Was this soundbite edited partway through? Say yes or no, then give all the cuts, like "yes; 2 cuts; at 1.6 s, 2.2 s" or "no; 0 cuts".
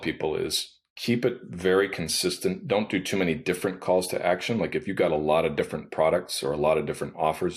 no; 0 cuts